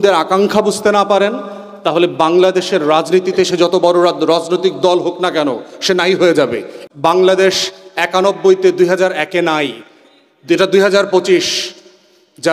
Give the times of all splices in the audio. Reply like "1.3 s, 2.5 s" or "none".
6.7 s